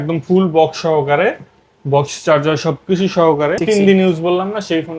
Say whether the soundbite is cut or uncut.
cut